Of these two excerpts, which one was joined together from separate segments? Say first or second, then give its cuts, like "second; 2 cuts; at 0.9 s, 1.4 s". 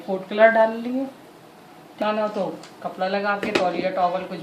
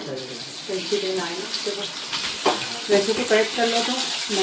first; 1 cut; at 2.0 s